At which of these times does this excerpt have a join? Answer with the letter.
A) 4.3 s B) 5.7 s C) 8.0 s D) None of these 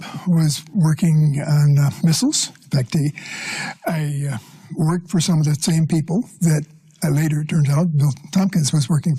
C